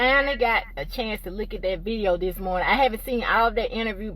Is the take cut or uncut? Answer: cut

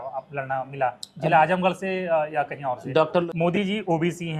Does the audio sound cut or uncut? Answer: cut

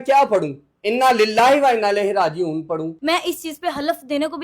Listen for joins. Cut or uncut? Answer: cut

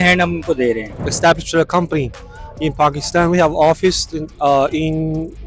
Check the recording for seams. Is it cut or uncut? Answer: cut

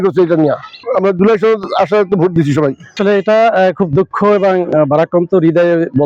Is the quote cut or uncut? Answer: uncut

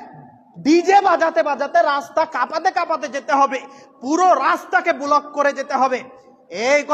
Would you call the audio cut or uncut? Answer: uncut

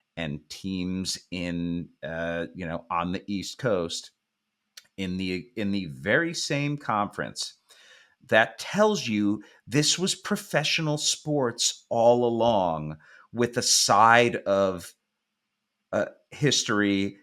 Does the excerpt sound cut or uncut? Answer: uncut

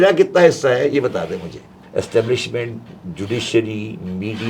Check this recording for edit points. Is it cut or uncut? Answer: cut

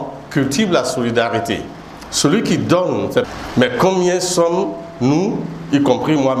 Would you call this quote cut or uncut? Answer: cut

